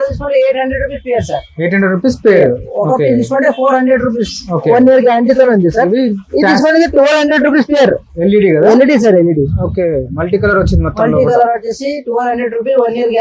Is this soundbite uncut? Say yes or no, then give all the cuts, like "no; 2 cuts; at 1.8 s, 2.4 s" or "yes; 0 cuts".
yes; 0 cuts